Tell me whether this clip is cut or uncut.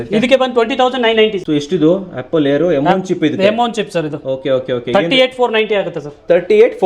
cut